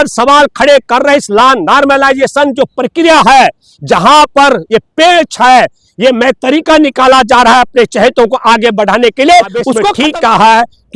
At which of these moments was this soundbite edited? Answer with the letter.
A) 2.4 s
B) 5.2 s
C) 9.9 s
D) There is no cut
C